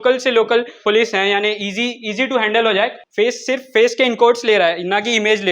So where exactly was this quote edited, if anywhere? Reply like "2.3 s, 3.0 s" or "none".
0.8 s, 3.0 s